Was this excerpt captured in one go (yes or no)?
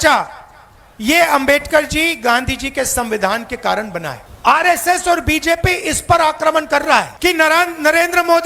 no